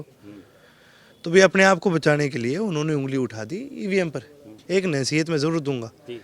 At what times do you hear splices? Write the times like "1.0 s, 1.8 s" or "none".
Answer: 4.5 s